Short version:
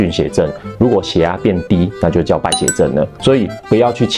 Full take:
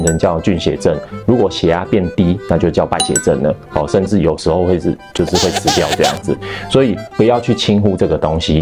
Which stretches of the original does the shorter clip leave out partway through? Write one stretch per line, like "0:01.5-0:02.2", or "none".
0:03.6-0:06.6